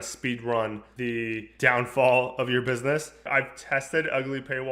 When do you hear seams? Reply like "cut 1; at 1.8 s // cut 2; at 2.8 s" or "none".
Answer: cut 1; at 1.1 s // cut 2; at 3.3 s